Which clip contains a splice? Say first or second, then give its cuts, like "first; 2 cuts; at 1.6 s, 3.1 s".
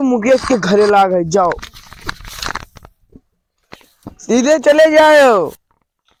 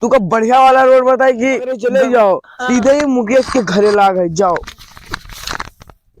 second; 1 cut; at 1.8 s